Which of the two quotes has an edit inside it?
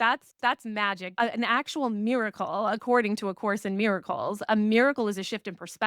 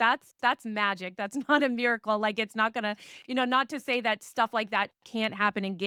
first; 1 cut; at 1.1 s

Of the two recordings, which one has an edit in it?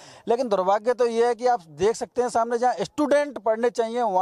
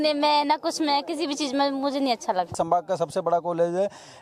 second; 1 cut; at 2.5 s

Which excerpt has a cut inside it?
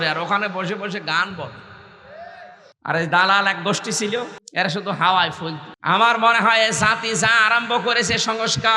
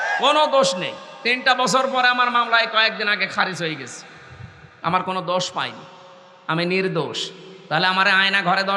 first; 3 cuts; at 2.7 s, 4.4 s, 5.7 s

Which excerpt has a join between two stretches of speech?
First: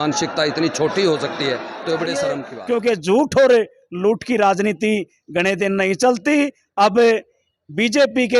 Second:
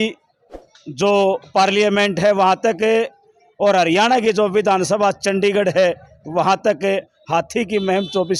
first; 1 cut; at 2.4 s

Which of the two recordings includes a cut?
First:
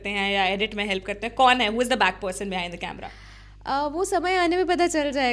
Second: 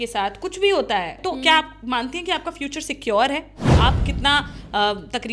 second; 2 cuts; at 1.2 s, 3.8 s

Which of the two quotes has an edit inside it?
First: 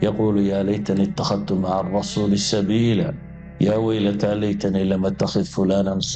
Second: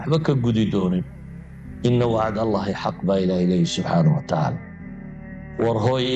second; 1 cut; at 1.1 s

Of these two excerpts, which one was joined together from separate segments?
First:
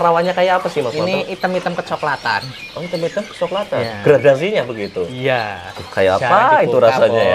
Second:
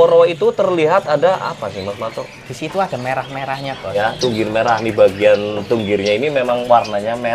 second; 1 cut; at 4.0 s

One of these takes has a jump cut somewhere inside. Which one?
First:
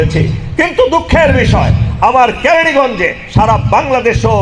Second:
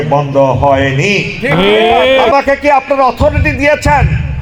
second; 1 cut; at 2.3 s

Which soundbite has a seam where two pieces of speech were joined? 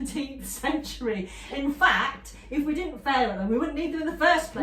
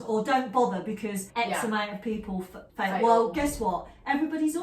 second; 2 cuts; at 1.2 s, 2.6 s

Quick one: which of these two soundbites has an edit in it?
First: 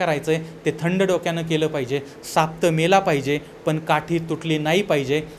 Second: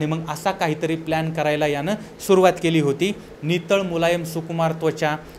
second; 1 cut; at 3.2 s

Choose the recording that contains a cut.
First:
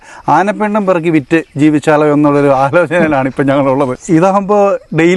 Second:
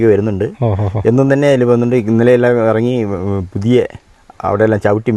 first; 1 cut; at 4.0 s

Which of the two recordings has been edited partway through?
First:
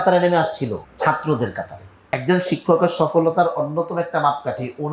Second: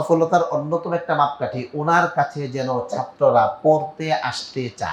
first; 2 cuts; at 0.9 s, 2.1 s

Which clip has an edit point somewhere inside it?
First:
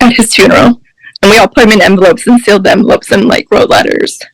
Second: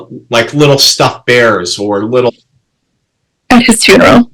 second; 1 cut; at 2.3 s

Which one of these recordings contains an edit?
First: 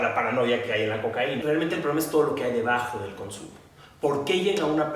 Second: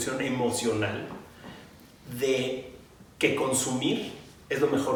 first; 1 cut; at 1.4 s

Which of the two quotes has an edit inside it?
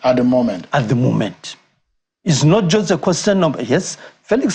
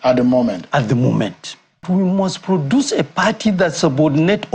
second; 1 cut; at 1.8 s

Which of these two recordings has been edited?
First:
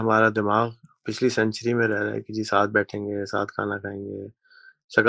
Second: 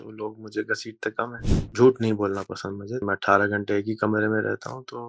second; 2 cuts; at 1.7 s, 3.0 s

